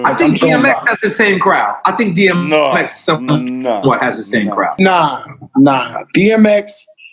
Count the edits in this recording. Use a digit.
1